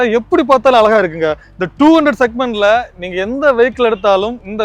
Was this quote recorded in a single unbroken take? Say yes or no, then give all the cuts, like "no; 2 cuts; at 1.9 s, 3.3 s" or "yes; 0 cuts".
yes; 0 cuts